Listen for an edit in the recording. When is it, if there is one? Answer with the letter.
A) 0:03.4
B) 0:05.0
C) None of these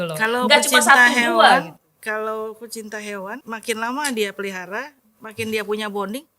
A